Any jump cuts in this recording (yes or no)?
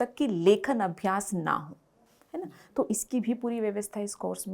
no